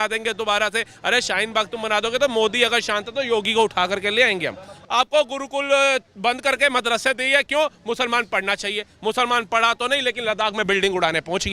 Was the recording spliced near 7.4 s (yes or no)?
no